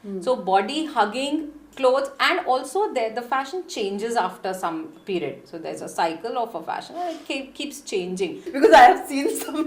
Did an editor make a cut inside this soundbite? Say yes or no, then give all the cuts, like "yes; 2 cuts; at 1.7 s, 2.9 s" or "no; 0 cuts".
yes; 1 cut; at 8.4 s